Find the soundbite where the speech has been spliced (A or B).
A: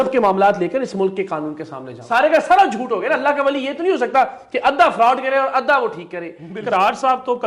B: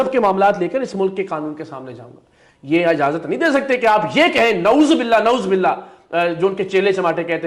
A